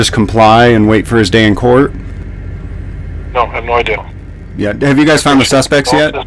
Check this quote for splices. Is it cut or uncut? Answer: cut